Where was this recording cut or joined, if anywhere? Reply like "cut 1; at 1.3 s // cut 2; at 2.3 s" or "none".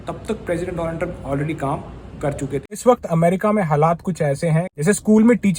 cut 1; at 2.6 s // cut 2; at 4.7 s

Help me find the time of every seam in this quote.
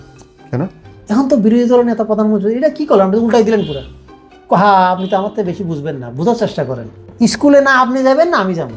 cut 1; at 7.0 s

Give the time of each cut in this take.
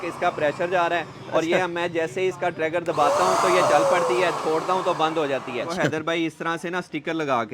cut 1; at 5.7 s

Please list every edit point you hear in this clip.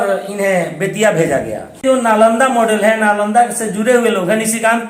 cut 1; at 1.8 s

